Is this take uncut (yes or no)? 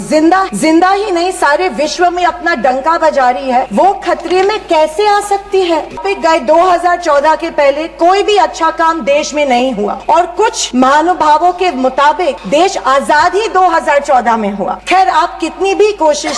no